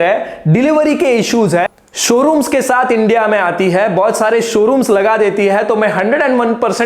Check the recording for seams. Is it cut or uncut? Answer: cut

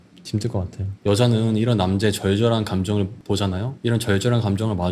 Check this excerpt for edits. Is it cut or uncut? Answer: uncut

